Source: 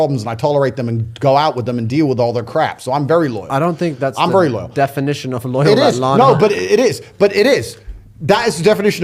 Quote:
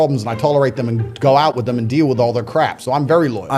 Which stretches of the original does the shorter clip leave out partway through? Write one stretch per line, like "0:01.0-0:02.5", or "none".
none